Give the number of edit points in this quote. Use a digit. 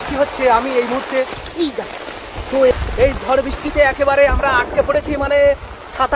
1